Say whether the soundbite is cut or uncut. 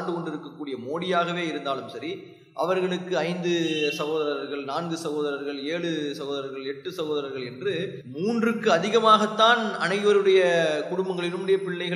uncut